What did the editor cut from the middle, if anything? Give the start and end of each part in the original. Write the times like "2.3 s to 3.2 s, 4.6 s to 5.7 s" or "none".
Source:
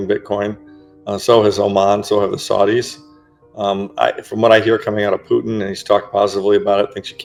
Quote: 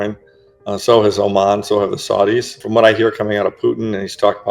3.0 s to 4.3 s